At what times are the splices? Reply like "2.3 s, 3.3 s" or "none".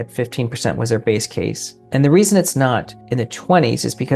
1.7 s, 3.0 s

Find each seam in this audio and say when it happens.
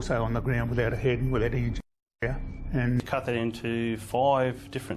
3.0 s

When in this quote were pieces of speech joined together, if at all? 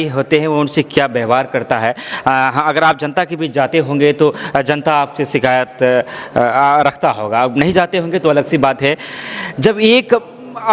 none

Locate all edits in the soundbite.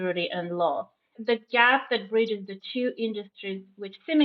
1.2 s

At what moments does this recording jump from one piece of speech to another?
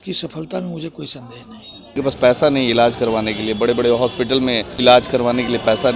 1.8 s, 4.7 s

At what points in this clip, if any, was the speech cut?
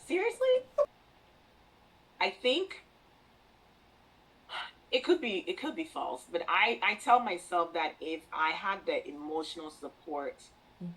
0.9 s

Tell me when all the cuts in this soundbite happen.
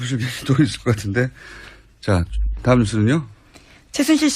none

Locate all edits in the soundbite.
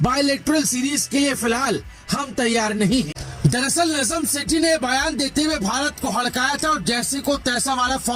3.2 s

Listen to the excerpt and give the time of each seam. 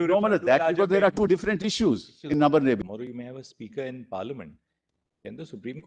2.8 s

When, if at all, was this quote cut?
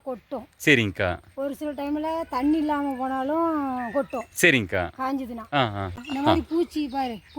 6.0 s

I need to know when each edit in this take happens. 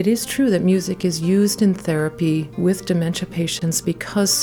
2.5 s

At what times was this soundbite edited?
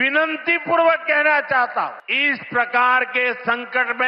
2.1 s

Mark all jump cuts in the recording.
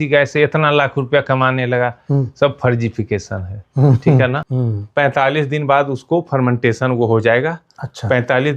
4.5 s

